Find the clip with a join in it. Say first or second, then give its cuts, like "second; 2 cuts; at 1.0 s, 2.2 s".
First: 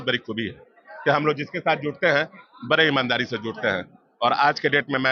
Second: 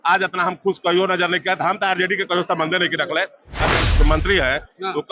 second; 1 cut; at 3.7 s